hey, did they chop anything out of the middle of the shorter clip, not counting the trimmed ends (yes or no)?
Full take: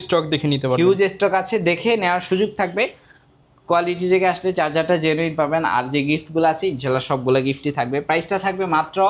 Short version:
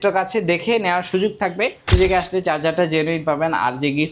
yes